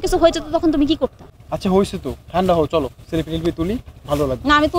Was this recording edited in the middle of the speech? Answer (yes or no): no